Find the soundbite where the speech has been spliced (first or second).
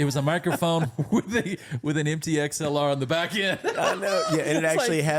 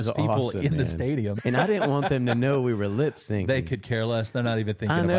second